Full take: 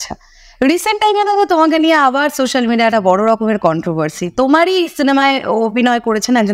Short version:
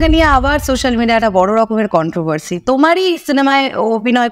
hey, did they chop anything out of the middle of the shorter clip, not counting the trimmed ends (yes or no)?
no